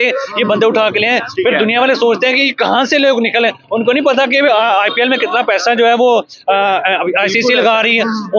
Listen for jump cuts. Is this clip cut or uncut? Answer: uncut